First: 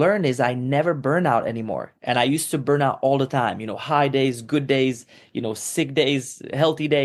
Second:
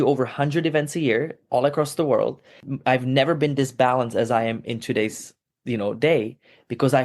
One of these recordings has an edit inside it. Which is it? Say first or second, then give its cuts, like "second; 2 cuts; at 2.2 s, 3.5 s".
second; 1 cut; at 2.7 s